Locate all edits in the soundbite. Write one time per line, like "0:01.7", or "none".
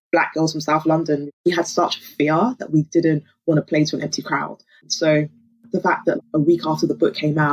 0:01.3